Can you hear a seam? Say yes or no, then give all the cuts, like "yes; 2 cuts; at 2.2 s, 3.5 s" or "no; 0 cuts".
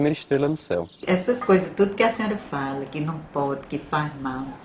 yes; 1 cut; at 1.0 s